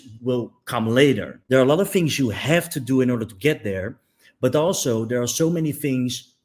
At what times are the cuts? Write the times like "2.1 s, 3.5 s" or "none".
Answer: 1.3 s